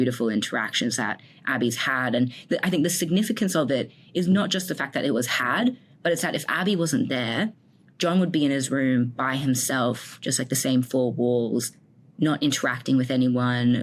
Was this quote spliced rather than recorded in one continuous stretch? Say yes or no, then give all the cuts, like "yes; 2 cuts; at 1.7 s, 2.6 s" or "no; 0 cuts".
no; 0 cuts